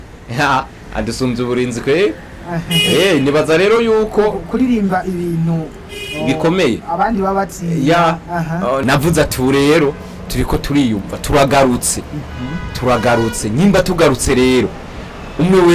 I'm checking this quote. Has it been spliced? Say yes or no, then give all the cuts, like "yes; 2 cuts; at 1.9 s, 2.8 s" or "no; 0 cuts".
yes; 1 cut; at 8.8 s